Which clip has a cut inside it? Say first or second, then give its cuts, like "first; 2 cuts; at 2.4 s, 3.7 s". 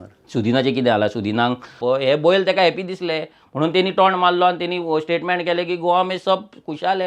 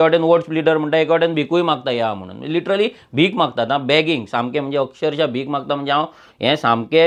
first; 1 cut; at 1.8 s